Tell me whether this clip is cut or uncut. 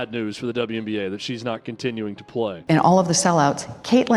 cut